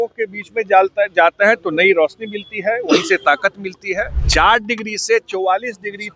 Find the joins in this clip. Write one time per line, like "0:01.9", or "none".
0:04.2